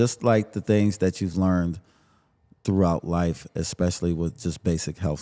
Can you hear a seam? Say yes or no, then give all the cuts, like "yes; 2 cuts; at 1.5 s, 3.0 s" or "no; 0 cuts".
no; 0 cuts